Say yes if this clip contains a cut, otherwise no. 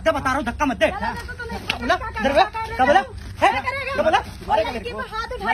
no